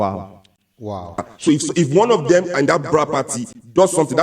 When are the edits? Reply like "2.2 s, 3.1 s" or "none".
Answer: 1.3 s